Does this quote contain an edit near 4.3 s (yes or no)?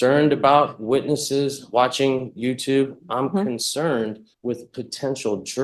yes